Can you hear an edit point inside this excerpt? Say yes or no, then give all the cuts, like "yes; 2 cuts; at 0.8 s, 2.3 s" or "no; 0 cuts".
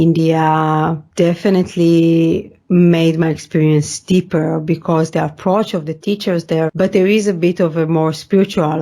yes; 3 cuts; at 1.0 s, 2.5 s, 6.7 s